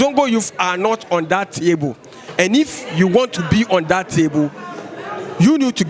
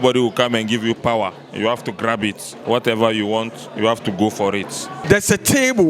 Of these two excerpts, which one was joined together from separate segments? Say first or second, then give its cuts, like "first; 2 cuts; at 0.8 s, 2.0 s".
second; 1 cut; at 4.9 s